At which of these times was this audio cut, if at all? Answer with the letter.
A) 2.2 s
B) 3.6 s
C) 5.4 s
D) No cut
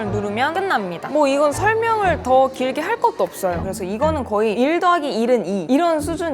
B